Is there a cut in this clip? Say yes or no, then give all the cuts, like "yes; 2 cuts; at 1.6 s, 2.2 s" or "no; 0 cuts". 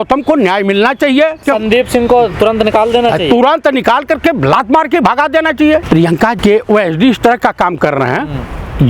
yes; 2 cuts; at 1.4 s, 6.0 s